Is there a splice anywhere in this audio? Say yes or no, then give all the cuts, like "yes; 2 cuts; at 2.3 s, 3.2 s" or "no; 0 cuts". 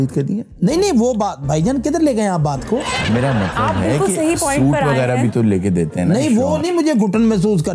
no; 0 cuts